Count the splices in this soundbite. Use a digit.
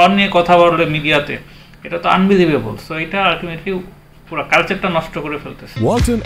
0